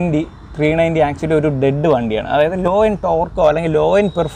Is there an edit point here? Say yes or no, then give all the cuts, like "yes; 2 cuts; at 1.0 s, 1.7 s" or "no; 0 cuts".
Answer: no; 0 cuts